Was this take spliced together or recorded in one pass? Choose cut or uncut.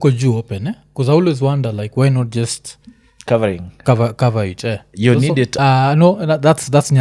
cut